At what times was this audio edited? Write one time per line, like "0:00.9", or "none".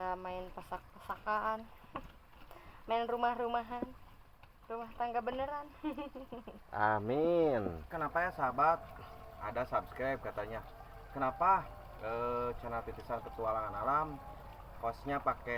0:07.9